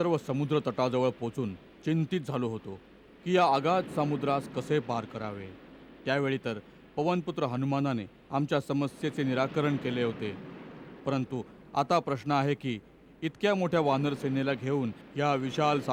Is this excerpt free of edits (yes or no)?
yes